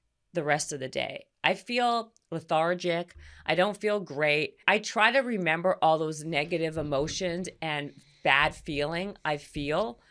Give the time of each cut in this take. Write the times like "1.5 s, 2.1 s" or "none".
4.6 s